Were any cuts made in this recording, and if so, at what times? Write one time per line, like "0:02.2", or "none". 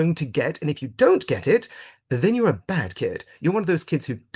none